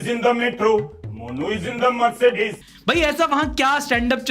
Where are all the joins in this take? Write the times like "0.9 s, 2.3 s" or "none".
2.7 s